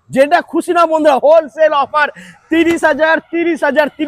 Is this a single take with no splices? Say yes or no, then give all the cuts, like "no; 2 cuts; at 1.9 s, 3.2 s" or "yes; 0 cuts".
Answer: yes; 0 cuts